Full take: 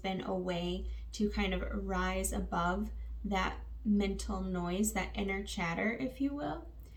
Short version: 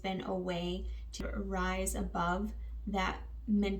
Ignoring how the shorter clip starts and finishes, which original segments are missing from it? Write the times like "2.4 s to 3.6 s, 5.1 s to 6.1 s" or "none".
1.2 s to 1.6 s